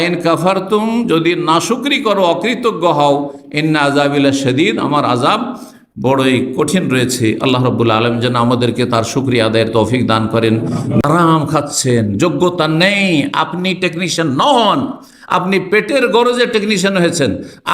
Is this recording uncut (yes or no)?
no